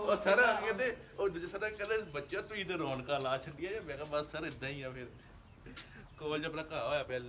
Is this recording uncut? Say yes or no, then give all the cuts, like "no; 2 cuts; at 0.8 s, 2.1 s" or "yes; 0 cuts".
yes; 0 cuts